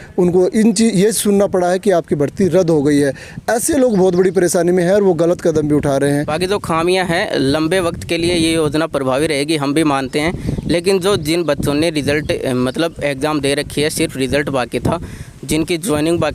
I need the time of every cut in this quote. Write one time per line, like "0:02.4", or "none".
0:06.3